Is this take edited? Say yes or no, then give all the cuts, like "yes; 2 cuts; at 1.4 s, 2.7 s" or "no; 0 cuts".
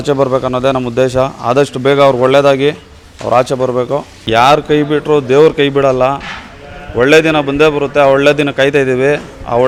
no; 0 cuts